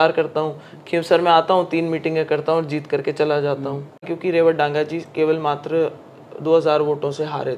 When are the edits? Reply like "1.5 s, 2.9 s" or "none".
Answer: 4.1 s